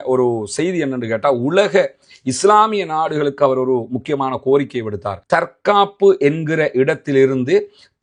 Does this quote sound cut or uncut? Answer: uncut